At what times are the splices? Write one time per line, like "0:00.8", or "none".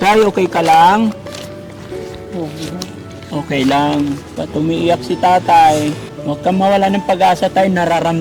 0:04.3
0:06.1

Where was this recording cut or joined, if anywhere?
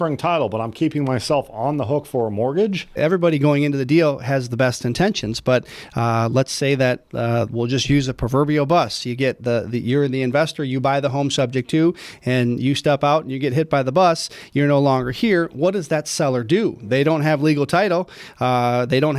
0:02.9

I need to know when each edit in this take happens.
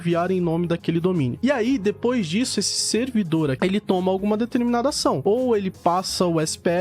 0:03.6

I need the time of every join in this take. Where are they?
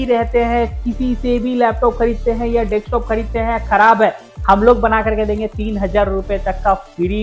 none

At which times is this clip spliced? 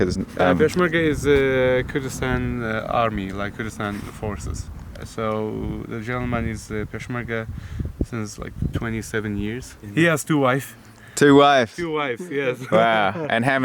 0:05.0
0:09.9

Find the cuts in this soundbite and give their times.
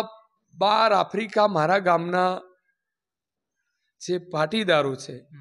none

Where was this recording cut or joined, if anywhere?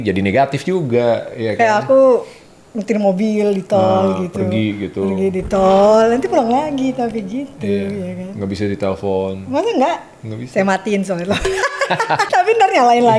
0:12.3

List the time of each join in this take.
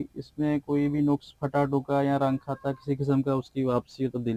none

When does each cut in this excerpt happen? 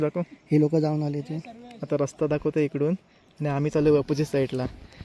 none

